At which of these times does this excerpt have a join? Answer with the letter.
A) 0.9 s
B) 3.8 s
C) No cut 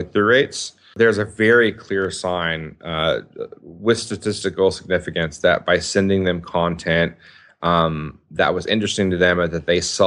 A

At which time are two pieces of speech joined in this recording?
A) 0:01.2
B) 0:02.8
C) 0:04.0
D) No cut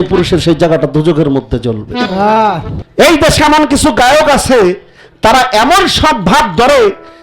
B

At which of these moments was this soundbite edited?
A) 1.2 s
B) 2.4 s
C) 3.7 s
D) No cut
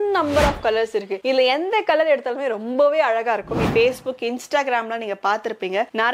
C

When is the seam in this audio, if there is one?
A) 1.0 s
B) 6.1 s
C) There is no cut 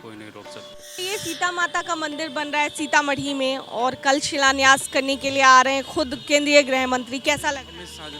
A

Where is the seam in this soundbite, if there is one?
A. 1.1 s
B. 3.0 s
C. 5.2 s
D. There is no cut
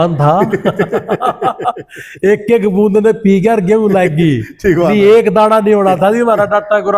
D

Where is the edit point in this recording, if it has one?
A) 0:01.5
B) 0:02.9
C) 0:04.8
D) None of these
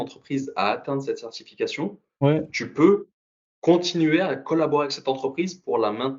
D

